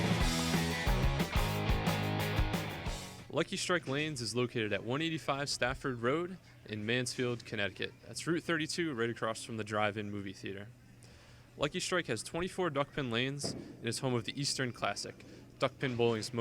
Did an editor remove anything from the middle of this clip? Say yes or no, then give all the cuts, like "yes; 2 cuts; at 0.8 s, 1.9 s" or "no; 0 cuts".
yes; 1 cut; at 3.0 s